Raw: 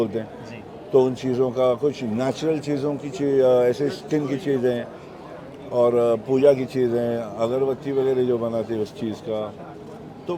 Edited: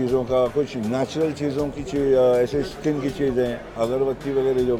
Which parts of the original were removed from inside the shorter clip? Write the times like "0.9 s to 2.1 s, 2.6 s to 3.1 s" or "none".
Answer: 4.9 s to 7.3 s

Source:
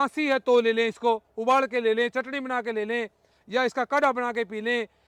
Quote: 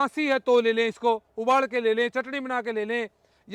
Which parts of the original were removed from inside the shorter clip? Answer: none

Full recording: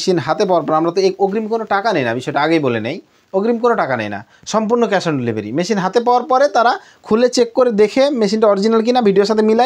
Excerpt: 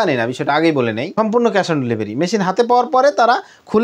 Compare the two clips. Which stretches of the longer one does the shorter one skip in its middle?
2.9 s to 4.4 s

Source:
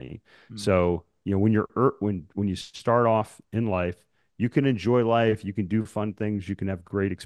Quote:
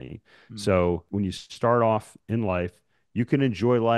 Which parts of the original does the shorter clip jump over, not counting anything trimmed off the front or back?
1.1 s to 2.3 s

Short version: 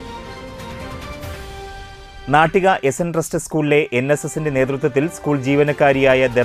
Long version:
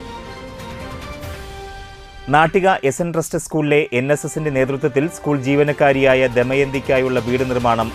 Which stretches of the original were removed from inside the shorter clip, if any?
none

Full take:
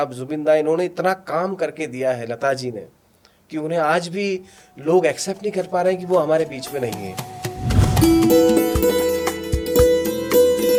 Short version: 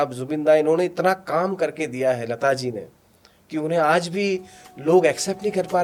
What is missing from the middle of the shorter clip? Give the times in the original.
none

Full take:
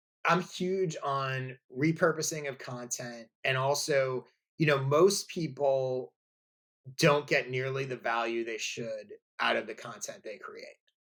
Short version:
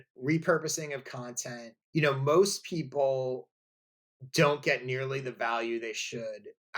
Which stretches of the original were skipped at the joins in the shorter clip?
3.3 s to 4.4 s

